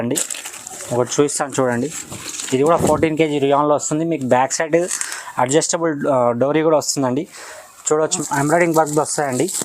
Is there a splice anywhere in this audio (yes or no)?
yes